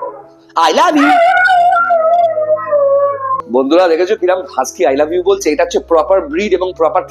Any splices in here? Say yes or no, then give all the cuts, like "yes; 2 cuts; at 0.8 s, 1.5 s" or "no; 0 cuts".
no; 0 cuts